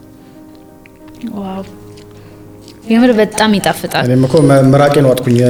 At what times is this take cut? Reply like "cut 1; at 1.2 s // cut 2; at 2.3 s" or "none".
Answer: none